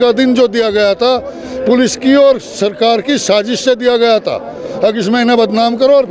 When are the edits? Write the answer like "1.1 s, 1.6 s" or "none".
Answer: none